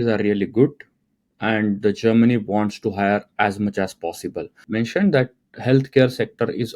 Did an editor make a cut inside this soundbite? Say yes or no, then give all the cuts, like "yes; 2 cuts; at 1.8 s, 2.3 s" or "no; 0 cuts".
yes; 1 cut; at 4.6 s